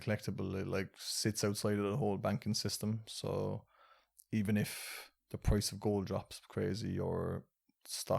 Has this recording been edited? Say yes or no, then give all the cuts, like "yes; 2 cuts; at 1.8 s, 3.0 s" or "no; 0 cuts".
no; 0 cuts